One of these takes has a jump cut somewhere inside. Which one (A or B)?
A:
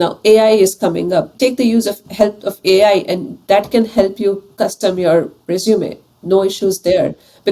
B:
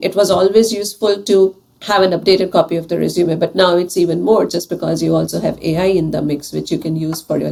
A